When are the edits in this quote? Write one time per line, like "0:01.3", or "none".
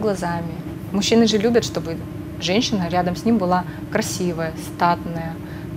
none